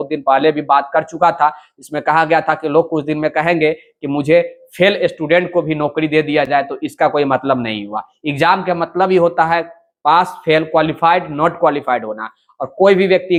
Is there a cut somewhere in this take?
no; 0 cuts

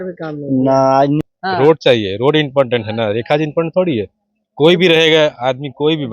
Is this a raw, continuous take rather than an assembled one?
no; 1 cut; at 1.2 s

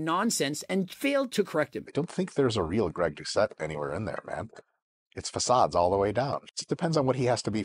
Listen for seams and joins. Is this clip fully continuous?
no; 1 cut; at 1.8 s

